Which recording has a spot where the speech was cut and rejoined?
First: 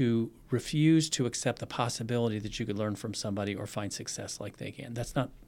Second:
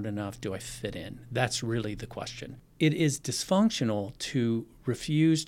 second; 1 cut; at 2.4 s

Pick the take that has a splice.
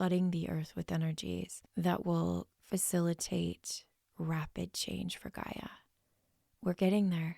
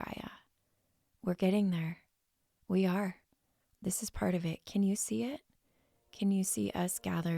first; 2 cuts; at 1.6 s, 2.5 s

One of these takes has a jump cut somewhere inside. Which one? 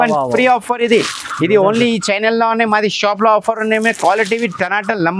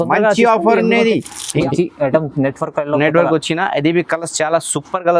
second; 1 cut; at 1.6 s

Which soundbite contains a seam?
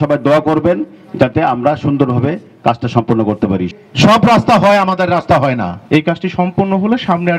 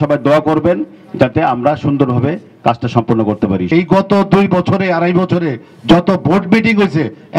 first; 2 cuts; at 3.6 s, 5.8 s

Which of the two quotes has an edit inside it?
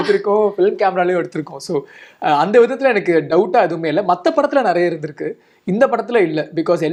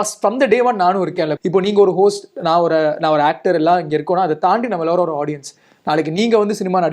second; 1 cut; at 1.4 s

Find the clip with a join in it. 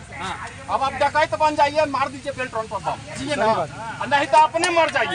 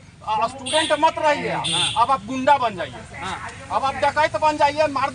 first; 1 cut; at 3.2 s

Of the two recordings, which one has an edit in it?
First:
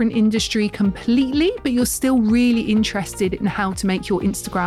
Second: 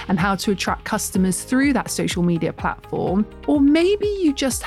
second; 1 cut; at 3.4 s

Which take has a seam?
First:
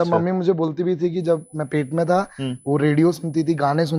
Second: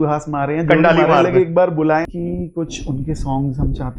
second; 1 cut; at 2.1 s

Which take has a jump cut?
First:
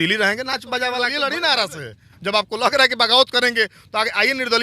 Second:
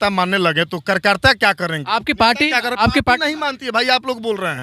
first; 1 cut; at 1.1 s

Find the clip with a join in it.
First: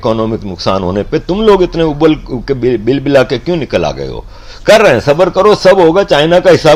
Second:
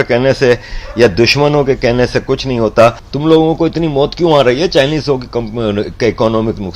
second; 1 cut; at 3.1 s

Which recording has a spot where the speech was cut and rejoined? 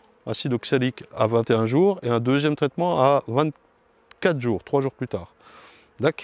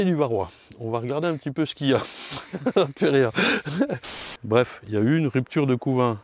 second; 1 cut; at 4.3 s

